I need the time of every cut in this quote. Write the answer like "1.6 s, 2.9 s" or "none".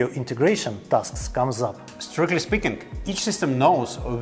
none